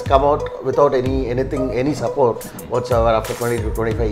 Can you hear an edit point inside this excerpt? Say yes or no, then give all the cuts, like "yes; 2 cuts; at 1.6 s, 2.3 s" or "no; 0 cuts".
no; 0 cuts